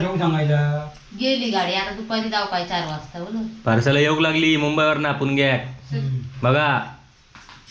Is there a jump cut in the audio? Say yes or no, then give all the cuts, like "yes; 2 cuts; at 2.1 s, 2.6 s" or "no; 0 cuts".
no; 0 cuts